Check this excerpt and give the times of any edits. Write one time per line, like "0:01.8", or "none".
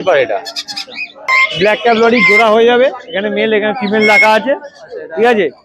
0:01.3